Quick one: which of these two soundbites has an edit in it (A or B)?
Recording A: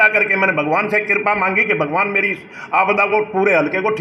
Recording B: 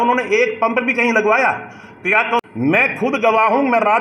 B